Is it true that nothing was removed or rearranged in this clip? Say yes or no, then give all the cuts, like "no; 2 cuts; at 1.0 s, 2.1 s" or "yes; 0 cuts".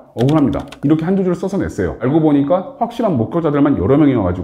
no; 1 cut; at 2.0 s